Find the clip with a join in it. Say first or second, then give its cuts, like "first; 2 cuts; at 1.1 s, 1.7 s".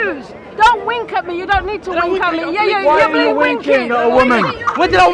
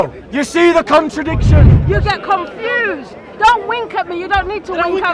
second; 1 cut; at 1.7 s